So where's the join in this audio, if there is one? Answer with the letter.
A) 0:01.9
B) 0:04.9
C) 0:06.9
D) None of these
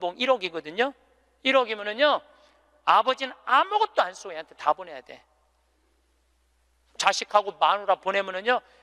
C